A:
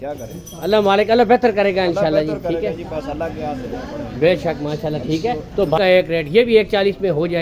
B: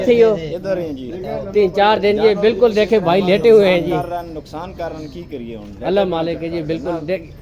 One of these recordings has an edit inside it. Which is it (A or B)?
A